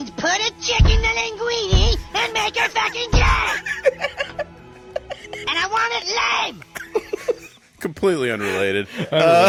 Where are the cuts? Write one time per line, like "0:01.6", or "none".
none